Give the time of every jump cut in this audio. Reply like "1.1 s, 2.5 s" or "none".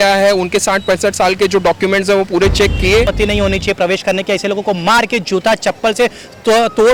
3.1 s